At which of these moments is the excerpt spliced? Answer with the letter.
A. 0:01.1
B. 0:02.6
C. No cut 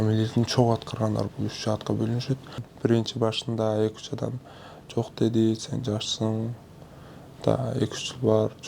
B